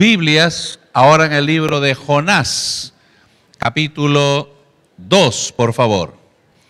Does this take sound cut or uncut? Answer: cut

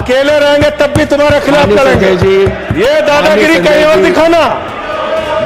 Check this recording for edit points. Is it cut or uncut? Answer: uncut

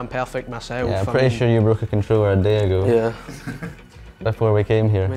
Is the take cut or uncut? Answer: uncut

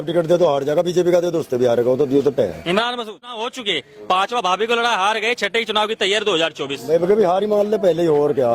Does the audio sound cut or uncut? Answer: cut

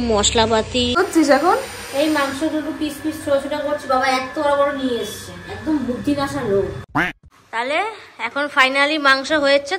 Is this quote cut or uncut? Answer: cut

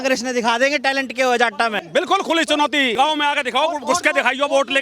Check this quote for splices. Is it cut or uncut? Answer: cut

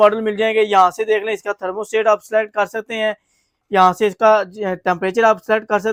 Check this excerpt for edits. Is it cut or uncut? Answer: uncut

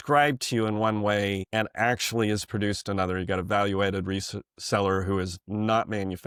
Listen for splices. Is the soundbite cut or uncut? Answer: uncut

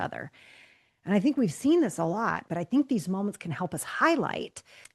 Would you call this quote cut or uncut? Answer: cut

